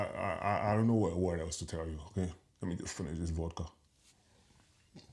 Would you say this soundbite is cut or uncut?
uncut